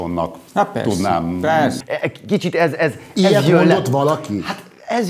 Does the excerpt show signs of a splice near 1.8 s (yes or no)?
yes